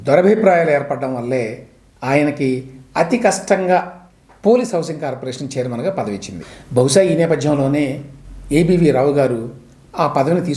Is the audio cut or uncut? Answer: uncut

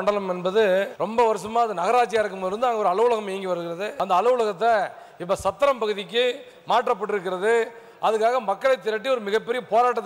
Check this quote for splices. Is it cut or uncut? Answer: cut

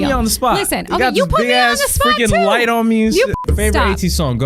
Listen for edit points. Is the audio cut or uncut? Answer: cut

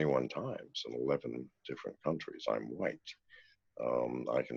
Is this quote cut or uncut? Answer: uncut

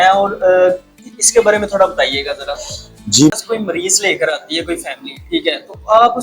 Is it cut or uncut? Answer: cut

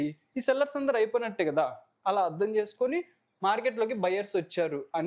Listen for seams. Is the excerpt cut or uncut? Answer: uncut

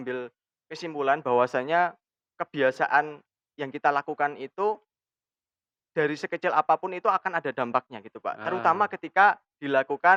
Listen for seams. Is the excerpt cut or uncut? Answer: uncut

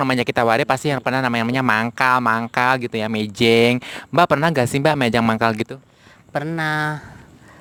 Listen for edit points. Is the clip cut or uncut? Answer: uncut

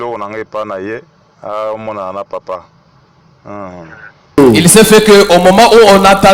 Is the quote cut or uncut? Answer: cut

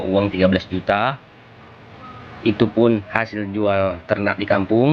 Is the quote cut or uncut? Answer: uncut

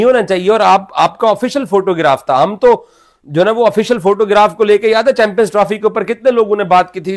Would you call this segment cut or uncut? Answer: uncut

